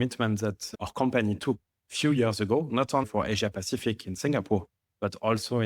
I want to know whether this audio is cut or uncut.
cut